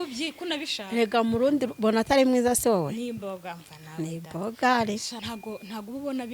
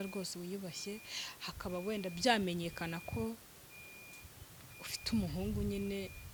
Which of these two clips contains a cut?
first; 1 cut; at 5.1 s

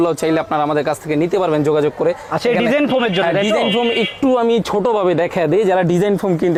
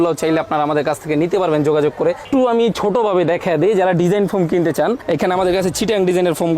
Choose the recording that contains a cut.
second; 1 cut; at 2.2 s

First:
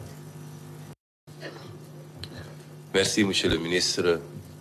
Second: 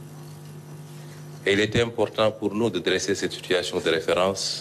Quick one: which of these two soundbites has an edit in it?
first; 1 cut; at 0.9 s

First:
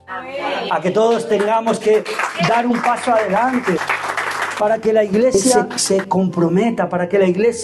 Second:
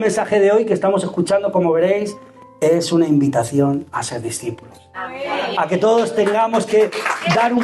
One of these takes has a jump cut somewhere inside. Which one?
first; 2 cuts; at 3.9 s, 5.5 s

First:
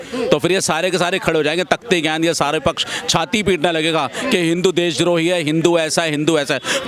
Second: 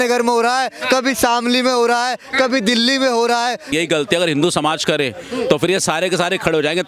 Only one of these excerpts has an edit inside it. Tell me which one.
second; 1 cut; at 3.7 s

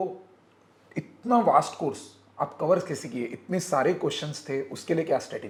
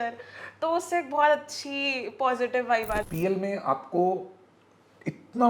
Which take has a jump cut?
second; 1 cut; at 3.0 s

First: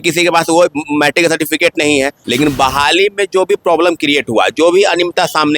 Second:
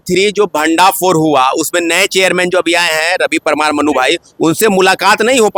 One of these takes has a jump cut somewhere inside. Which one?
first; 1 cut; at 2.2 s

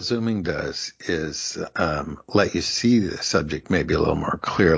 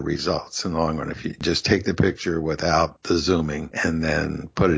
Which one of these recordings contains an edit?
second; 2 cuts; at 1.4 s, 3.1 s

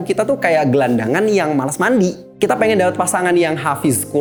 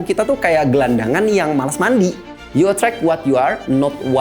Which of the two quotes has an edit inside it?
second; 1 cut; at 2.3 s

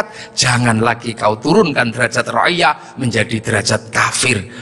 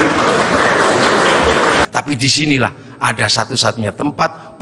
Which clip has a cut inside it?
second; 1 cut; at 1.9 s

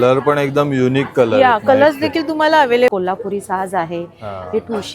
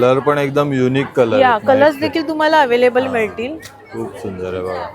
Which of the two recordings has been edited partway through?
first; 1 cut; at 2.9 s

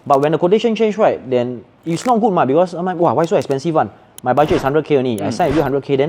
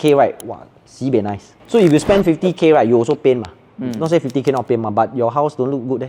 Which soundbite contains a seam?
second; 1 cut; at 1.5 s

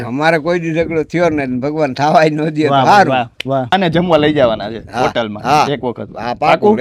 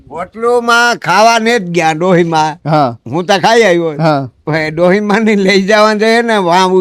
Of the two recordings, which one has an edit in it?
first; 1 cut; at 3.7 s

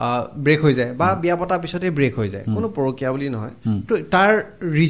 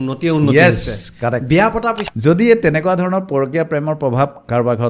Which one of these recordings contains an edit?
second; 1 cut; at 2.0 s

